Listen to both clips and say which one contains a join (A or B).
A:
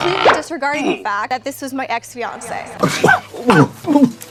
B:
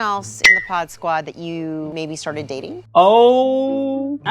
B